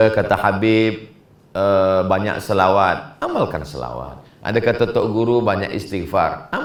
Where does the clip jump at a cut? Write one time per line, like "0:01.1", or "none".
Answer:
none